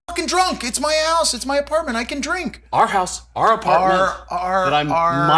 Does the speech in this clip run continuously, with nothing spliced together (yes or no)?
yes